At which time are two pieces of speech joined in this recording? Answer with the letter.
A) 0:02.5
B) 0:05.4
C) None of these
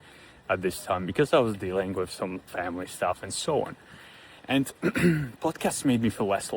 A